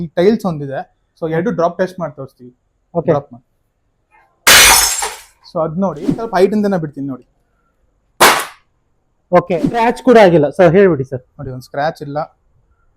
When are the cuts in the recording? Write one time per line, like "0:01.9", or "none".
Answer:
0:06.3
0:09.7

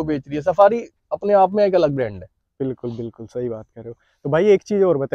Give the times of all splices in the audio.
none

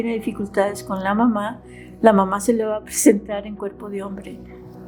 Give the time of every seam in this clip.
none

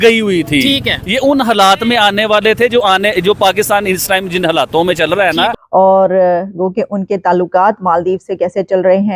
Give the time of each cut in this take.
0:05.5

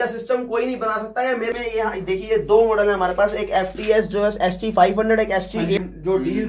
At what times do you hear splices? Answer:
0:01.5
0:05.8

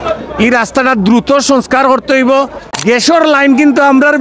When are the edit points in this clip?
0:02.6

